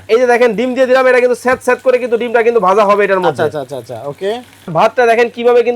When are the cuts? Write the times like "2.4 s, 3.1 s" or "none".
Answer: 4.7 s